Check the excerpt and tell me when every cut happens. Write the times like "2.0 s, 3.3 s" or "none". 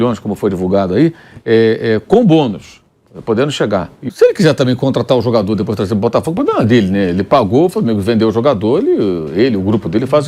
4.0 s